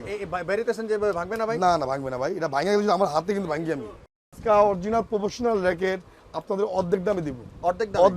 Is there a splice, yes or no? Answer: yes